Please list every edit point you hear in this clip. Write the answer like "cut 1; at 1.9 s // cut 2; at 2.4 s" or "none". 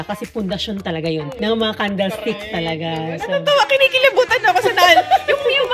cut 1; at 1.3 s